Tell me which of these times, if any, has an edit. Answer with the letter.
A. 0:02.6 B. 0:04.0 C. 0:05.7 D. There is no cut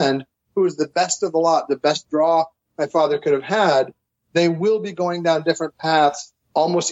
D